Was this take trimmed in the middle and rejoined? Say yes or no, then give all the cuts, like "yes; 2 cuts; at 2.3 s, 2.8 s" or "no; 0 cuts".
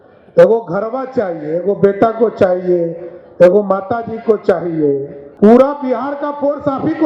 yes; 1 cut; at 5.2 s